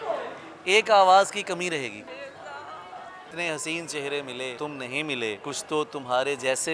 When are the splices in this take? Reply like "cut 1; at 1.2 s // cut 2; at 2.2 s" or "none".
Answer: cut 1; at 2.1 s // cut 2; at 3.3 s // cut 3; at 4.6 s // cut 4; at 5.4 s